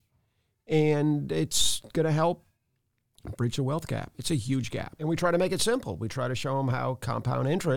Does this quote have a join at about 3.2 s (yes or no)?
no